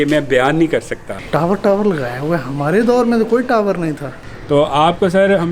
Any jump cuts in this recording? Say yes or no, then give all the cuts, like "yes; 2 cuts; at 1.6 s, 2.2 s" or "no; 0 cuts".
yes; 2 cuts; at 1.1 s, 4.1 s